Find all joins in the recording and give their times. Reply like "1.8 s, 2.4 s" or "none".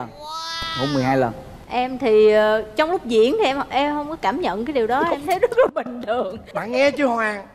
1.5 s, 6.5 s